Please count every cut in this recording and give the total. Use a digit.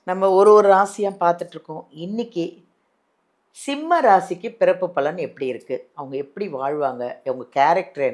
0